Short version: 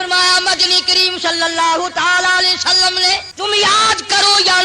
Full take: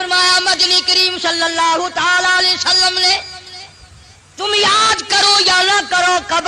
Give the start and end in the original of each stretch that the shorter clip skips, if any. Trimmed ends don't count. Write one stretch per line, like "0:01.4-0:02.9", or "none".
0:03.3-0:04.3